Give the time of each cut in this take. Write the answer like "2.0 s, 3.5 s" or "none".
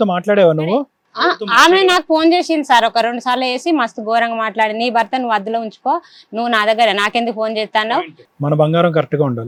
none